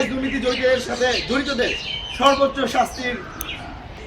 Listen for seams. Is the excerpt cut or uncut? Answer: uncut